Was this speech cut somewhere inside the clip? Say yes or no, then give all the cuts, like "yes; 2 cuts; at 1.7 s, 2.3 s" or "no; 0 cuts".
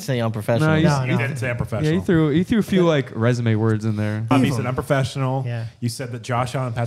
yes; 1 cut; at 4.3 s